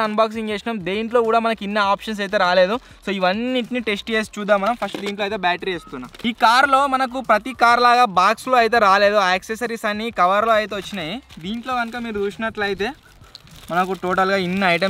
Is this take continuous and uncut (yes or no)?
yes